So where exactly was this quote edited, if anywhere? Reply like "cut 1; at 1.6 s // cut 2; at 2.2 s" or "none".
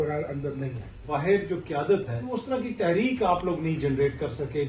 cut 1; at 1.0 s // cut 2; at 2.4 s